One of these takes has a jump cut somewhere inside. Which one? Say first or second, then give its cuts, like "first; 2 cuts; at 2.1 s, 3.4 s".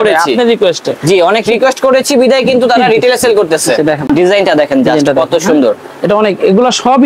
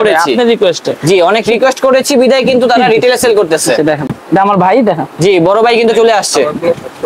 first; 1 cut; at 4.1 s